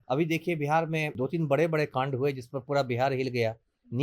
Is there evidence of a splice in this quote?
yes; 1 cut; at 1.2 s

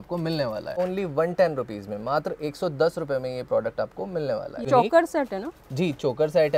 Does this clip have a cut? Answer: yes; 2 cuts; at 0.8 s, 4.6 s

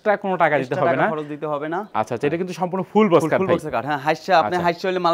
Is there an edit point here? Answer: no; 0 cuts

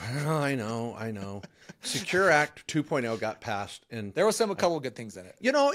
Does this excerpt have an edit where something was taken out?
no; 0 cuts

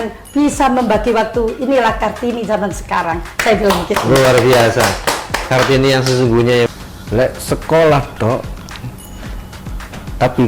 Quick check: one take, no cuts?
no; 1 cut; at 6.7 s

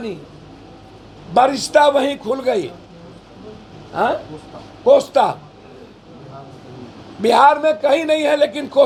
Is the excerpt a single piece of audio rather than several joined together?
yes; 0 cuts

